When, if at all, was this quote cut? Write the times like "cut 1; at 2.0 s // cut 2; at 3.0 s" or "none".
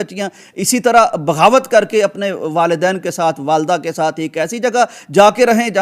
none